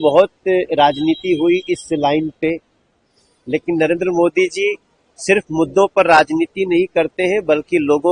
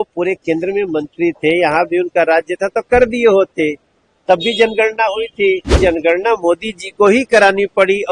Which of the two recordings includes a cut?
second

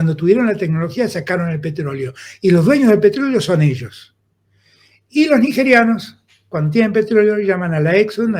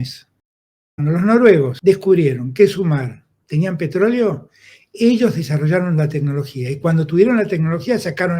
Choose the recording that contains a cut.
second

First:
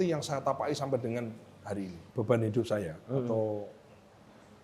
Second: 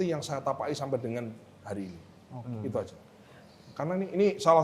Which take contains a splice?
first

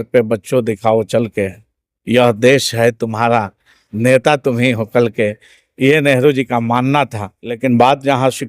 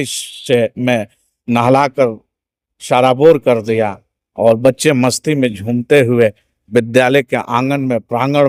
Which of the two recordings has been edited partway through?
first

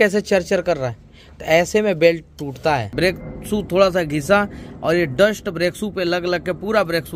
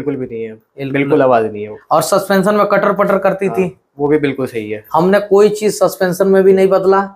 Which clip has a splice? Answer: first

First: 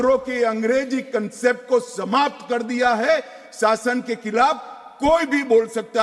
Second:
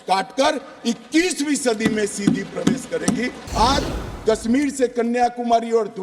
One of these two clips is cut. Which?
second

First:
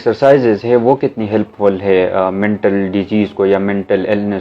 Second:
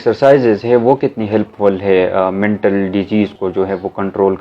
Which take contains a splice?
second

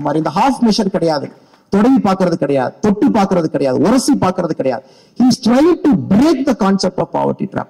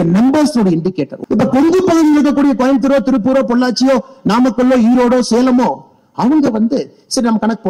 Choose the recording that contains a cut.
second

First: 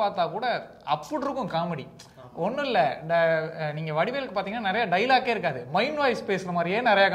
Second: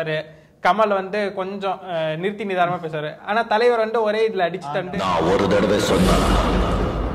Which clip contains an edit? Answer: second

